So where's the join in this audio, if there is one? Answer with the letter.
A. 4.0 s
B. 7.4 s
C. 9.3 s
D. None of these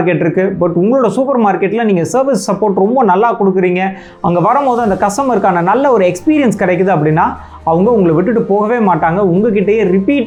D